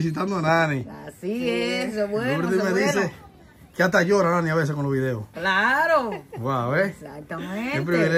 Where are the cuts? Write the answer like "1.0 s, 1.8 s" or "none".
none

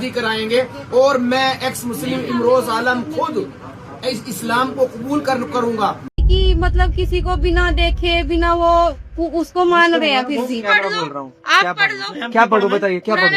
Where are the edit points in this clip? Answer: 6.1 s

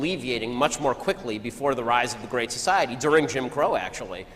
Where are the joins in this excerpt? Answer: 1.2 s

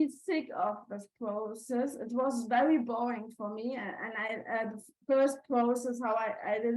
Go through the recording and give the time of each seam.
none

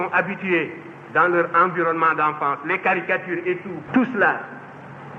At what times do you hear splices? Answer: 3.7 s

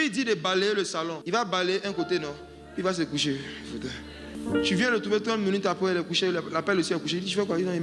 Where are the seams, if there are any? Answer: 1.2 s, 4.3 s

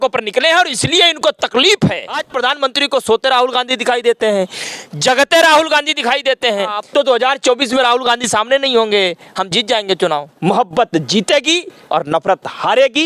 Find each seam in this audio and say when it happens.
2.3 s, 6.8 s, 10.3 s

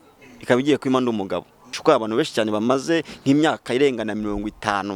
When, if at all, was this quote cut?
1.7 s

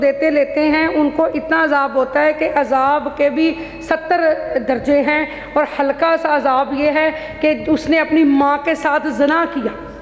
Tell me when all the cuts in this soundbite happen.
none

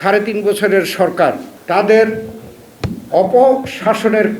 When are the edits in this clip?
1.5 s

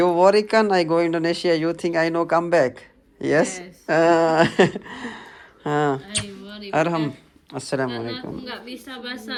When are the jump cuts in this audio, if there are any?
none

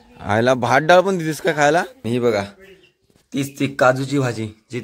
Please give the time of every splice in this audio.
2.0 s

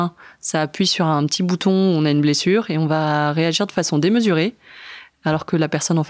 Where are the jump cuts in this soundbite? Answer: none

